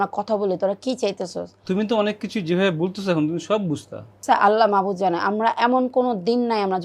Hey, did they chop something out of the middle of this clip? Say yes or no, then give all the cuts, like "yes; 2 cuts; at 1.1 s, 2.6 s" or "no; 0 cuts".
yes; 2 cuts; at 1.5 s, 4.2 s